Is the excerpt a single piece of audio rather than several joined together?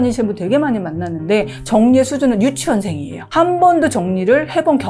yes; 0 cuts

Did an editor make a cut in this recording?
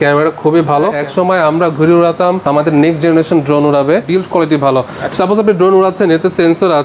yes; 2 cuts; at 1.0 s, 4.0 s

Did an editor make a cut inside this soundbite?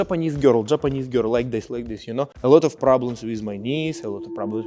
yes; 1 cut; at 2.3 s

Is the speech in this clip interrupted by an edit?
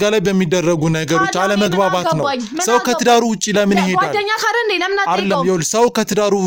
no; 0 cuts

